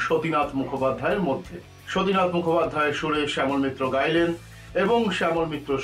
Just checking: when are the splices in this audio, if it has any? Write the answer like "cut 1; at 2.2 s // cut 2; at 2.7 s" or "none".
cut 1; at 1.8 s